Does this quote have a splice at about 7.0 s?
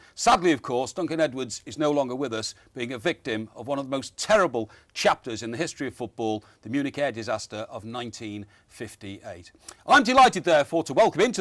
no; 1 cut; at 5.4 s

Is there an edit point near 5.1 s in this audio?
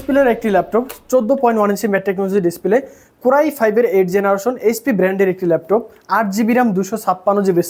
no; 0 cuts

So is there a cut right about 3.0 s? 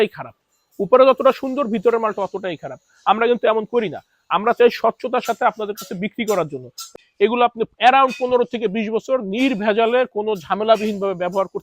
no; 1 cut; at 7.0 s

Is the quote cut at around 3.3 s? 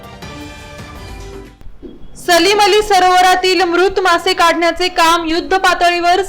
no; 1 cut; at 1.2 s

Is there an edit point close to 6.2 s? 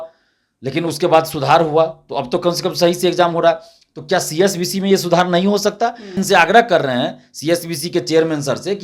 yes; 1 cut; at 6.2 s

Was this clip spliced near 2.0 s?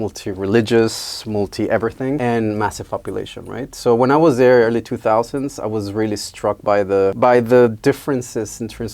no; 0 cuts

